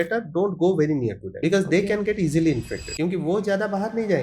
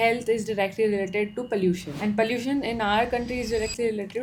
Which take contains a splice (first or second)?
first